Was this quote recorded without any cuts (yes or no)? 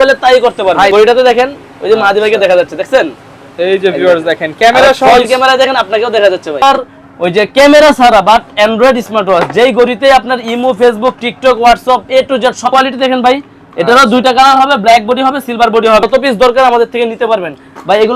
no